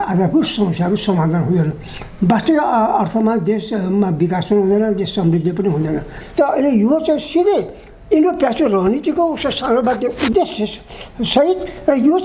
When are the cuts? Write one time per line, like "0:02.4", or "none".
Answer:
0:06.1